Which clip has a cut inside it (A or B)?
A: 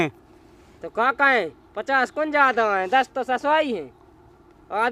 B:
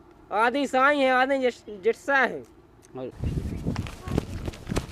B